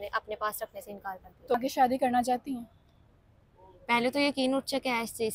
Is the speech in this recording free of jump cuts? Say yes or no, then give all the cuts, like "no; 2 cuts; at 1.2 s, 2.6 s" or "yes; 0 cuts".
no; 1 cut; at 1.5 s